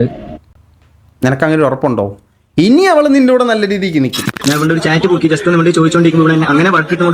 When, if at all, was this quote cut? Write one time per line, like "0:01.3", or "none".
0:04.3